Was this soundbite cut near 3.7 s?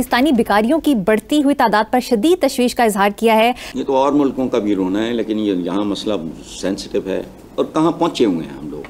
yes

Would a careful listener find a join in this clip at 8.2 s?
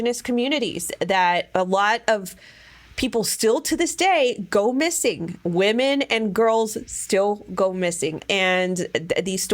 yes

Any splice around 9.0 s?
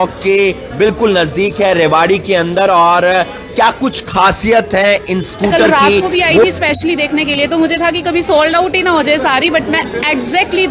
no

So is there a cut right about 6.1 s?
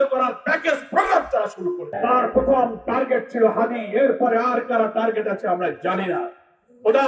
no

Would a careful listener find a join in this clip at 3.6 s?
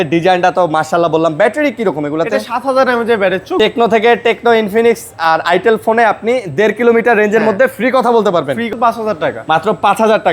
yes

